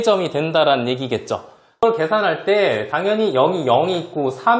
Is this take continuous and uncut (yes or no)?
no